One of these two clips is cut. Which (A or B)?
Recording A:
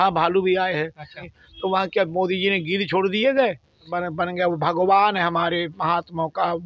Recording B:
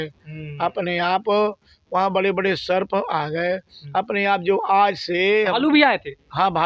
A